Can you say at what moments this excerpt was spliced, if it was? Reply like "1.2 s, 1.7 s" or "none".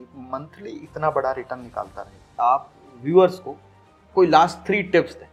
2.3 s